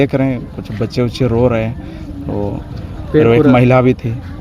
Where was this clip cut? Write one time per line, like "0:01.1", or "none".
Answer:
none